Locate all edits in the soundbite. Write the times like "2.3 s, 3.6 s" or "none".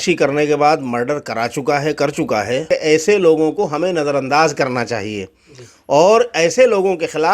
2.6 s

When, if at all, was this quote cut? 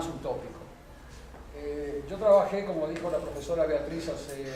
none

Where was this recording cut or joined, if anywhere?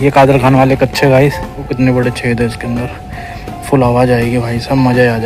1.7 s

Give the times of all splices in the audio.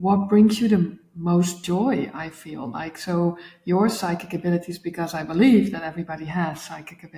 none

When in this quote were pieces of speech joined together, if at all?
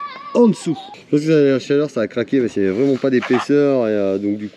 0.9 s

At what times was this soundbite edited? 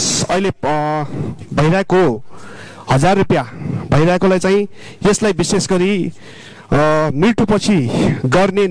none

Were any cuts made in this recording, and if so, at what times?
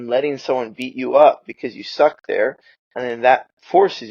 none

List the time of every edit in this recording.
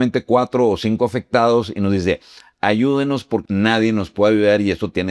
3.4 s

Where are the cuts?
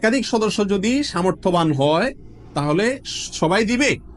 none

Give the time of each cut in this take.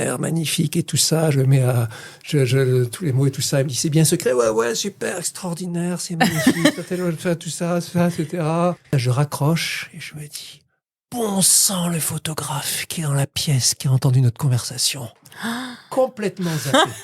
8.9 s, 15.9 s

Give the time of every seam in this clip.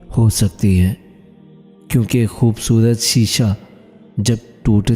none

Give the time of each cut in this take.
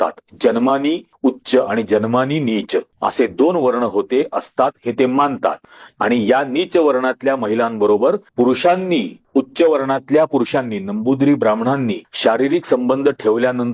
none

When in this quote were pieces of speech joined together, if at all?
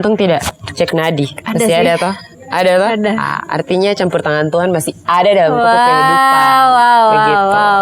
1.4 s

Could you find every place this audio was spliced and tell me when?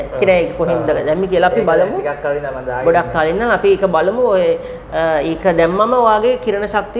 none

